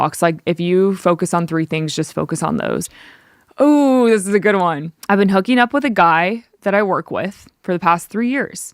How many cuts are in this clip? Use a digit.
2